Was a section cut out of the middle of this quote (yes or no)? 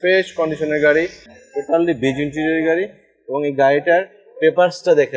yes